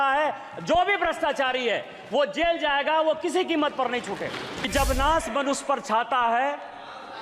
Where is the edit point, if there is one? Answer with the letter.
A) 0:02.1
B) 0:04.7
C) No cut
B